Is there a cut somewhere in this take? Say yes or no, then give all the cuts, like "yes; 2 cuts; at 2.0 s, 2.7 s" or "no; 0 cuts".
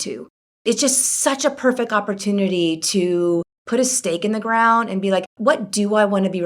yes; 2 cuts; at 3.6 s, 5.3 s